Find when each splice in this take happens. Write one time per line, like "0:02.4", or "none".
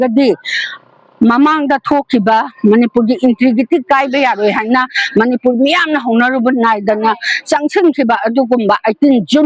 none

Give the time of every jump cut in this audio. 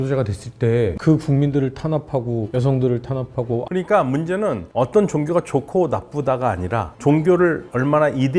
0:01.0
0:03.7

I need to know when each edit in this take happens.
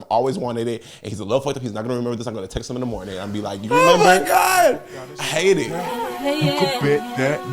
0:05.8

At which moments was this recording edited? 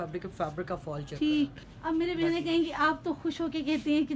0:01.7

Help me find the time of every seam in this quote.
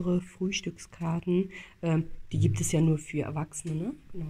none

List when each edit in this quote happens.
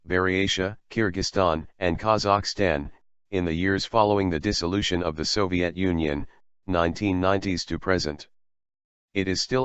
none

